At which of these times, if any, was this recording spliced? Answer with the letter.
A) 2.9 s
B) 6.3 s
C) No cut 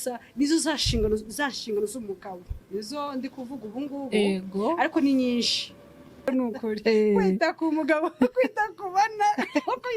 B